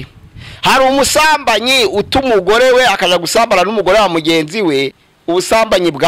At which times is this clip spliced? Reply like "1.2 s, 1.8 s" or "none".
5.0 s